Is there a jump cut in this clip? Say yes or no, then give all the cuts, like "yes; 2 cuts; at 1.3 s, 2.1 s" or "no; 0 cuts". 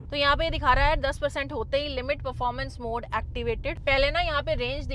yes; 1 cut; at 3.8 s